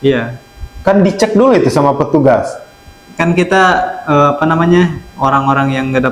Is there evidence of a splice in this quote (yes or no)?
no